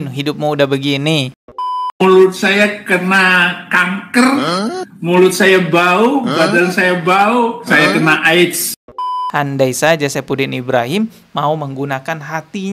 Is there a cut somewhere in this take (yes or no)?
yes